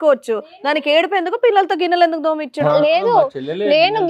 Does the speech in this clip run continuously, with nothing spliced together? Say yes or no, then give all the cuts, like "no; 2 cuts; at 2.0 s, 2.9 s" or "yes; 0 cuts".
yes; 0 cuts